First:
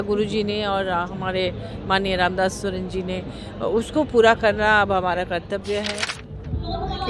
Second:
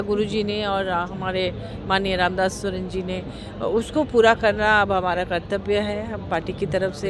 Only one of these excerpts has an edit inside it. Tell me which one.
first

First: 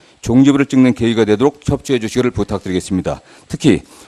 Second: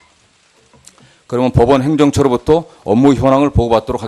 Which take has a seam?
first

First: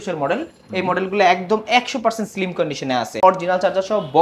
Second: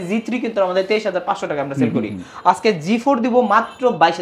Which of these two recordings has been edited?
first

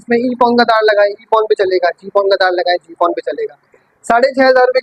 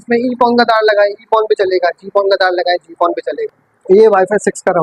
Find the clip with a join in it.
second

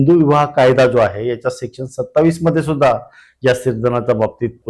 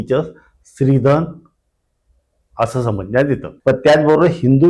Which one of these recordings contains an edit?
second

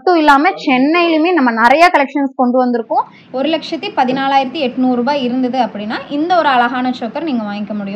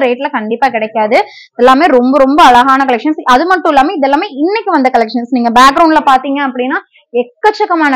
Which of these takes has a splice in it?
first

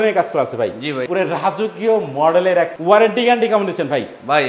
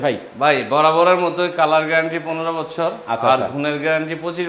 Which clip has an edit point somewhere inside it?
first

